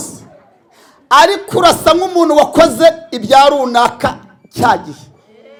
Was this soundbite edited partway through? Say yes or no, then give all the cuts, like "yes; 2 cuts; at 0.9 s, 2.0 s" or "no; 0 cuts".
no; 0 cuts